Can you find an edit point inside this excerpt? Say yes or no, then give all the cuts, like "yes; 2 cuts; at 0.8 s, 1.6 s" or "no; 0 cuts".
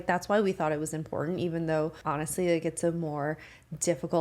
yes; 1 cut; at 2.0 s